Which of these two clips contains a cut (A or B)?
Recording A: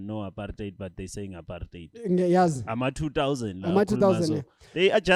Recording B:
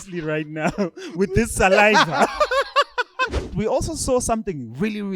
B